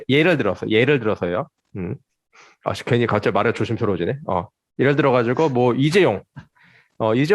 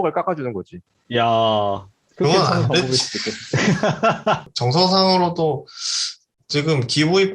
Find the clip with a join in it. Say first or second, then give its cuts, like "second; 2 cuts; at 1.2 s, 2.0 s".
second; 1 cut; at 4.5 s